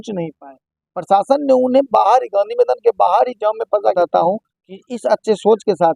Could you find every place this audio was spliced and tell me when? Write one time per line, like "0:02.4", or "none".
0:03.9